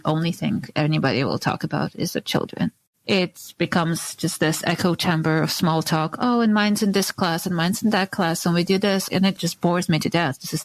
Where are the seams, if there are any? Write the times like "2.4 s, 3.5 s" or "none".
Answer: 9.1 s